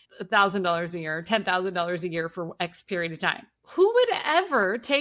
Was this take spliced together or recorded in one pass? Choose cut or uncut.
cut